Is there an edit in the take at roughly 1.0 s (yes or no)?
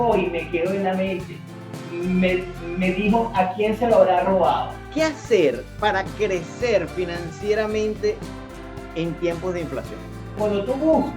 no